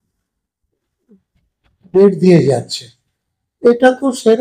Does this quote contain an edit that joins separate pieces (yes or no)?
no